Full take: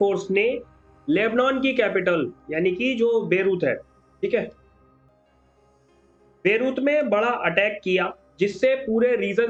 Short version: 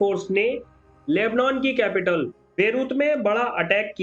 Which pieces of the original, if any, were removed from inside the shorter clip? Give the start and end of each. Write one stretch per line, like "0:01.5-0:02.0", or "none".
0:02.4-0:06.3